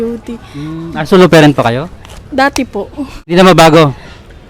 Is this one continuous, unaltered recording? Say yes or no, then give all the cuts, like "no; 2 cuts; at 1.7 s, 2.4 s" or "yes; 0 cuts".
no; 1 cut; at 3.3 s